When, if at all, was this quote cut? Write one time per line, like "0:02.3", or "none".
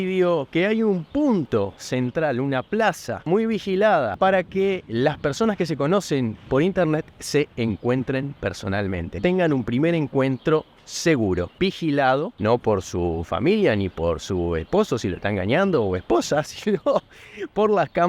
0:03.3
0:04.1
0:09.2
0:11.5
0:12.3